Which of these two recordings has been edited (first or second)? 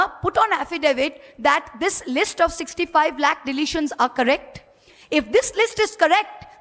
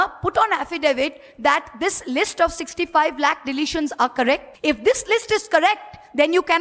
second